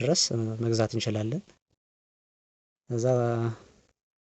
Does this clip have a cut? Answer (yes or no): no